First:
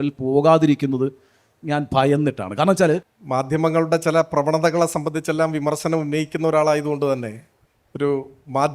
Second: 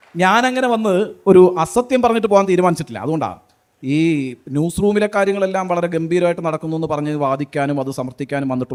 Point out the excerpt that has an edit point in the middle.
first; 1 cut; at 3.2 s

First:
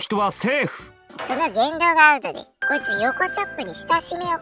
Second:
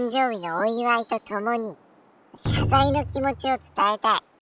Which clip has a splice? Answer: first; 1 cut; at 2.5 s

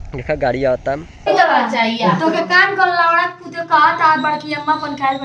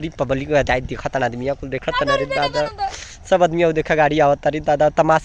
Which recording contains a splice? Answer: first; 1 cut; at 1.3 s

